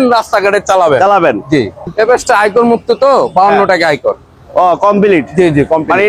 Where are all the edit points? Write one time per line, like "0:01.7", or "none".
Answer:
0:01.8

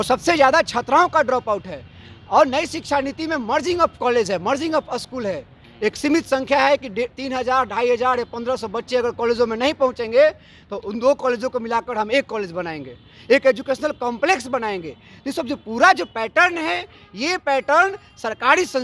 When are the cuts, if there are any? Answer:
none

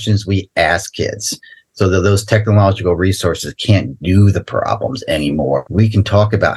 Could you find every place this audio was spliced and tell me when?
0:05.7

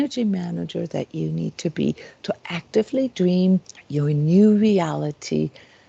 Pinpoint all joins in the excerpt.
0:03.8

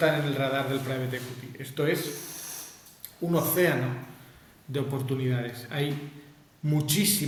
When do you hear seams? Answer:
none

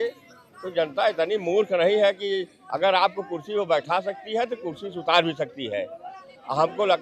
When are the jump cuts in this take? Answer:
none

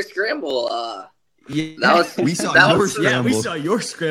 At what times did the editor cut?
none

